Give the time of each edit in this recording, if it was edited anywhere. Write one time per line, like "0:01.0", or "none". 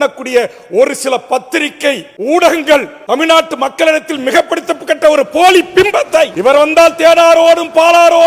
0:02.1
0:02.9
0:06.3